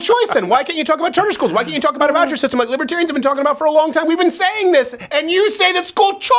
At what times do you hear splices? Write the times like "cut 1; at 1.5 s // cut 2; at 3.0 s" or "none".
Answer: none